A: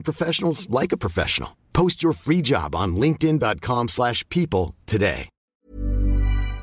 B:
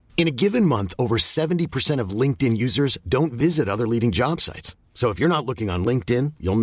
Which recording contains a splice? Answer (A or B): A